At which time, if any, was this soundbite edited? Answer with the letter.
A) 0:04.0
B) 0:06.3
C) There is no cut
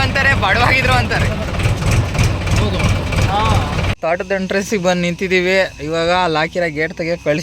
A